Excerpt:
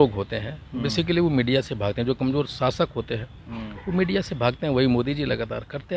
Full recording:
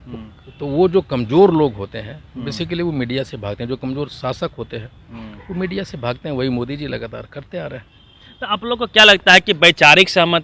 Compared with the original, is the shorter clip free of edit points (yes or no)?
yes